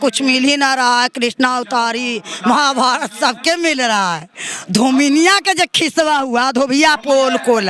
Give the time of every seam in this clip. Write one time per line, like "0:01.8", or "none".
none